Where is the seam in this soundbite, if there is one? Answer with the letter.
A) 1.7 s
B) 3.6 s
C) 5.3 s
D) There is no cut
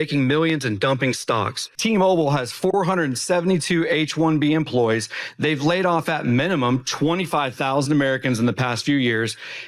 A